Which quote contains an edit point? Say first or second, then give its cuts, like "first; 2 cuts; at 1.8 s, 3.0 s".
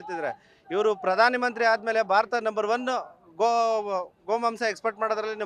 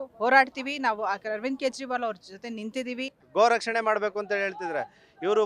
second; 1 cut; at 3.1 s